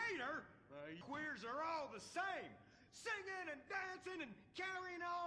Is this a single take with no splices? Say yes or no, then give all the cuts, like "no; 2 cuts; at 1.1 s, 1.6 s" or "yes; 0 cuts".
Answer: no; 1 cut; at 1.0 s